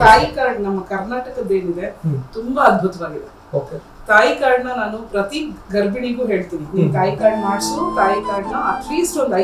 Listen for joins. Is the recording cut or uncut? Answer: uncut